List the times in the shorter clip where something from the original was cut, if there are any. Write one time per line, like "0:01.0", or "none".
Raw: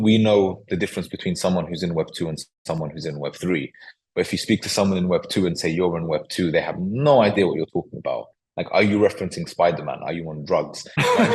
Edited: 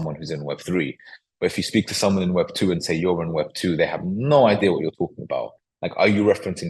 none